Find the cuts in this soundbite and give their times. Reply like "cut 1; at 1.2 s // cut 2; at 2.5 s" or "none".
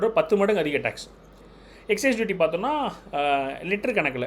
none